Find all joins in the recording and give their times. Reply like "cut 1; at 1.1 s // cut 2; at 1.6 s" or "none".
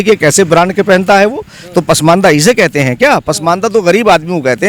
none

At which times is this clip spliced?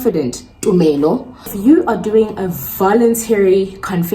cut 1; at 1.5 s

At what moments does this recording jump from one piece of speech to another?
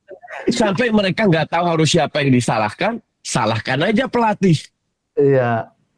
none

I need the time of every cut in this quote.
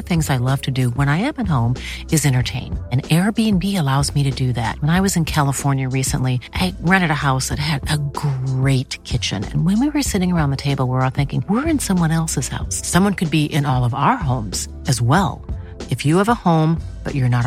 none

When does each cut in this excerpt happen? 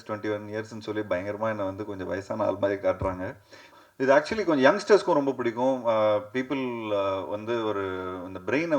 cut 1; at 3.8 s

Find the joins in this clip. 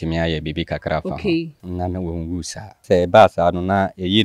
cut 1; at 1.6 s // cut 2; at 2.8 s

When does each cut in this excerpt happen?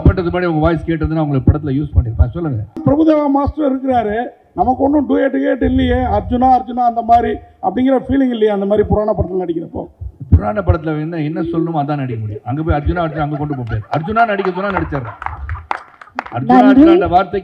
cut 1; at 2.8 s

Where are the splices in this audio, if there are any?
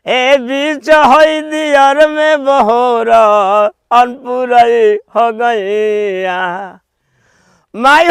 none

